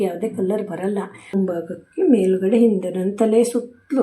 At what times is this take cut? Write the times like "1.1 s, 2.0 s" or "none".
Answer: 1.3 s